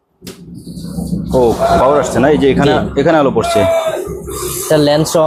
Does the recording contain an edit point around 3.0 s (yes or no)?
no